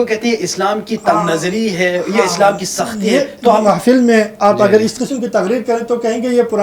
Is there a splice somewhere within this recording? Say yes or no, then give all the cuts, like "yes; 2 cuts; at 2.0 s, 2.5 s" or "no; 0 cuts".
yes; 1 cut; at 3.6 s